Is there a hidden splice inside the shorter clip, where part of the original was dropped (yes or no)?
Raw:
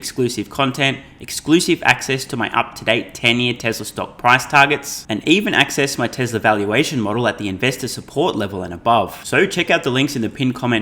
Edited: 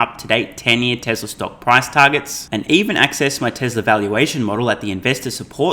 no